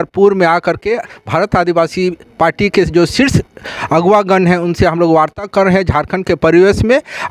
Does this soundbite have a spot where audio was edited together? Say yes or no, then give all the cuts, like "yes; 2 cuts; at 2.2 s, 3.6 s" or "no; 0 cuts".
no; 0 cuts